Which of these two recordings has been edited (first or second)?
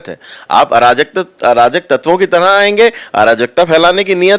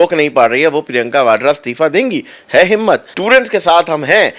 second